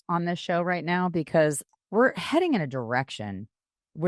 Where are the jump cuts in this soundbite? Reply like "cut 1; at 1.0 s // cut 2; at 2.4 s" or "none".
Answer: cut 1; at 1.7 s